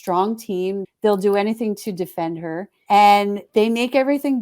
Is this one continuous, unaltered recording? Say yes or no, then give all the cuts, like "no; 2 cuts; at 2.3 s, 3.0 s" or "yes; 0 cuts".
no; 3 cuts; at 0.8 s, 2.7 s, 3.4 s